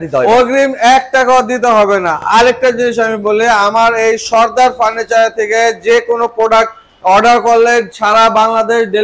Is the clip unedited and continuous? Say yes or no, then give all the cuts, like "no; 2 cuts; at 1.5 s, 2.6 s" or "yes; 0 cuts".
yes; 0 cuts